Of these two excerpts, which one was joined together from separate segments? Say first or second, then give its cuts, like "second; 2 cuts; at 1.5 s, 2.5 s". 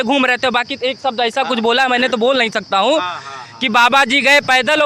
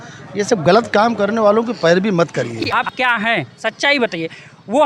second; 1 cut; at 2.6 s